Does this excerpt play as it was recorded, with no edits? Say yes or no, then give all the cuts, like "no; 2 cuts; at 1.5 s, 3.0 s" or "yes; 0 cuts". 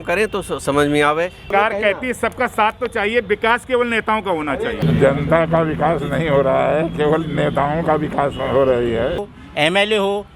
no; 3 cuts; at 1.5 s, 4.8 s, 9.3 s